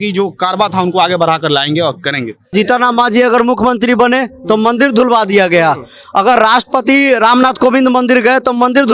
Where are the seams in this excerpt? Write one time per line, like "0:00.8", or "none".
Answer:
0:02.5